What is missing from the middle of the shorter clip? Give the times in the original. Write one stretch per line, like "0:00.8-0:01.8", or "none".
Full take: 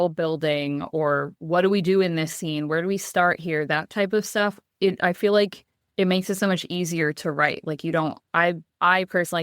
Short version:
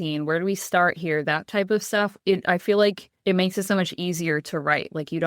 0:04.6-0:04.7
0:05.6-0:05.8